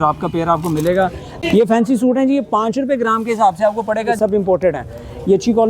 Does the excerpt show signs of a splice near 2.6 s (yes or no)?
no